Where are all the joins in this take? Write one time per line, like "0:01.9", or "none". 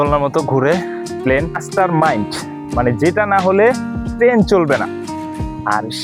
0:01.6